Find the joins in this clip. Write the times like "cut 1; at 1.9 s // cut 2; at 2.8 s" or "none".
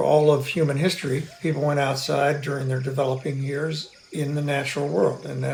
none